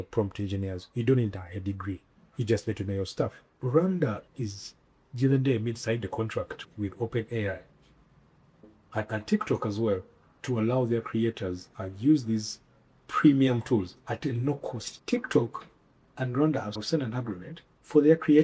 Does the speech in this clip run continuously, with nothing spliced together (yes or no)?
no